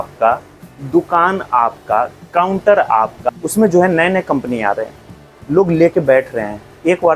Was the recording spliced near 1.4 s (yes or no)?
no